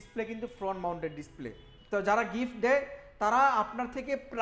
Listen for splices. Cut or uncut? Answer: cut